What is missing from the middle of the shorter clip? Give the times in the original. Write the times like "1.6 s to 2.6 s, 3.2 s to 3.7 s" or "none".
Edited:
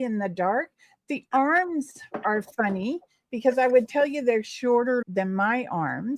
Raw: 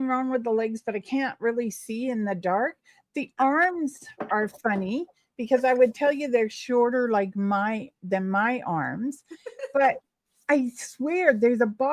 7.1 s to 8.0 s